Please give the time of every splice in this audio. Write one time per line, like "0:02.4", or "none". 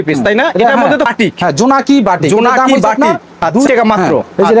0:01.1
0:03.7